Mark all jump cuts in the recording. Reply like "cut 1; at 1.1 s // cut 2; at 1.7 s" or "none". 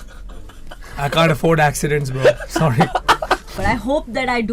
cut 1; at 3.5 s